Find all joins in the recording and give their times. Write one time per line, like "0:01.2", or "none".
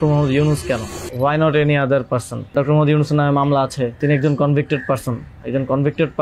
0:01.0
0:02.5
0:04.0